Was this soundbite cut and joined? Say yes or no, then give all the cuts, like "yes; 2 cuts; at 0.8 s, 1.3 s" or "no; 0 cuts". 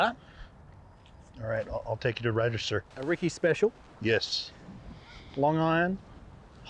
yes; 1 cut; at 2.9 s